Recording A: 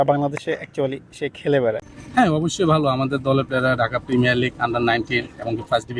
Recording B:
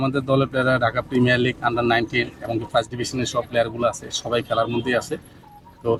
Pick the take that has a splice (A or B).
A